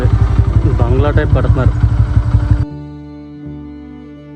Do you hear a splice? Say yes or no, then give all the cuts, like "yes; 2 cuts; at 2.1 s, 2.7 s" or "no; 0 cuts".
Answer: no; 0 cuts